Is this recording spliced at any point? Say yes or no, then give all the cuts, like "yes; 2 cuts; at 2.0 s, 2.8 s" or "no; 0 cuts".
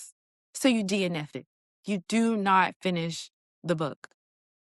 no; 0 cuts